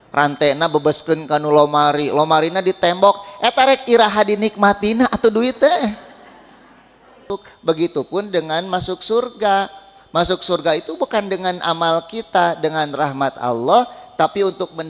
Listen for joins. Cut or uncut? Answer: cut